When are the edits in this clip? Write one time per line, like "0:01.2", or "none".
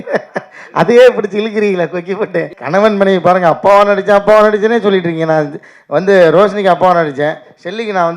0:02.6